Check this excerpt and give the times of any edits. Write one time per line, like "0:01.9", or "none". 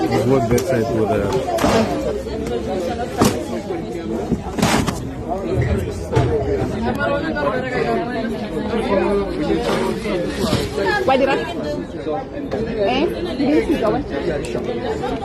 none